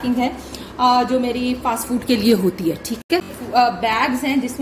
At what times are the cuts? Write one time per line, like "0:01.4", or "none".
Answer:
0:03.4